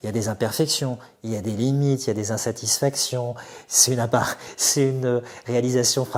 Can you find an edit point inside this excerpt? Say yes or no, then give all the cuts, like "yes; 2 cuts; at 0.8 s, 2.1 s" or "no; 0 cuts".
no; 0 cuts